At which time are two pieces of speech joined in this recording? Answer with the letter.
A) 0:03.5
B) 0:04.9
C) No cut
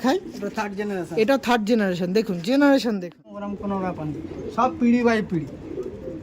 A